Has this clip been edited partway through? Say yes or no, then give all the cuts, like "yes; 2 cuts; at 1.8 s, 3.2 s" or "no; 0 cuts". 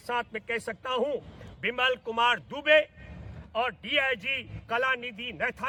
no; 0 cuts